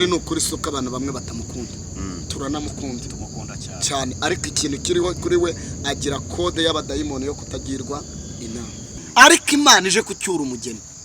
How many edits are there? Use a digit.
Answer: 1